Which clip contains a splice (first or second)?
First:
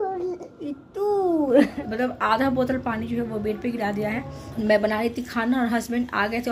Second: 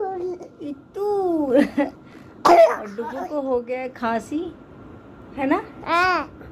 first